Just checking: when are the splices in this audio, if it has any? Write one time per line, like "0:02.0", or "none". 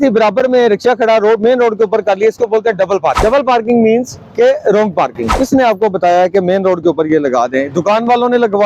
0:03.2
0:05.3